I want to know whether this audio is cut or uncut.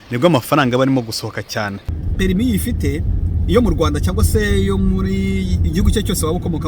cut